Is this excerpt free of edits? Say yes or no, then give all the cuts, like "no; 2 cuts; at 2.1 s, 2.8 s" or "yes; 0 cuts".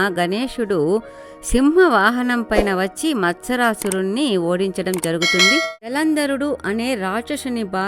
no; 1 cut; at 5.9 s